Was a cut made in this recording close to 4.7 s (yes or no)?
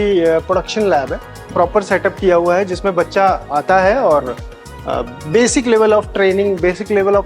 no